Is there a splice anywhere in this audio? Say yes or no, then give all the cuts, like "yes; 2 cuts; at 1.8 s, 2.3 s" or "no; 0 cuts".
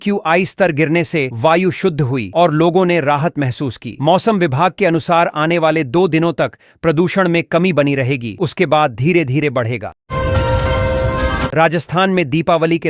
yes; 2 cuts; at 10.0 s, 11.5 s